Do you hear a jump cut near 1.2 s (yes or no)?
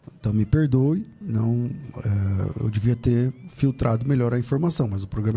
yes